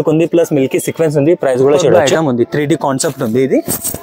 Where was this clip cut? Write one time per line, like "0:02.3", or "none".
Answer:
0:02.1